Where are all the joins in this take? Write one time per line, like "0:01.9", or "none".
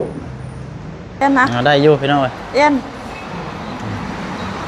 0:01.2